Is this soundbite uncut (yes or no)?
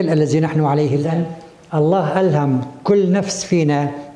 no